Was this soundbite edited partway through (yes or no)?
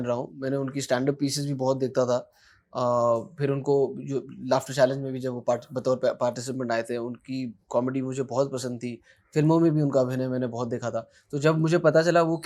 no